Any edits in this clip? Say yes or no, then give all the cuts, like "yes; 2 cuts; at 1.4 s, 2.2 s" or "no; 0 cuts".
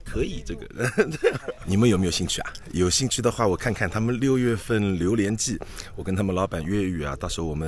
yes; 1 cut; at 1.5 s